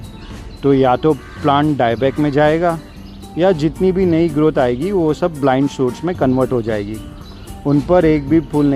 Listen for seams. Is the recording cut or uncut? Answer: uncut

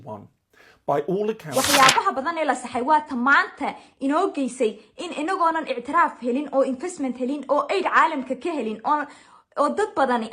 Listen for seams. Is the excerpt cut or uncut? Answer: cut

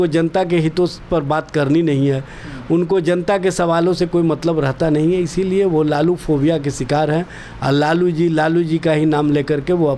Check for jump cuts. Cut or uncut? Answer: uncut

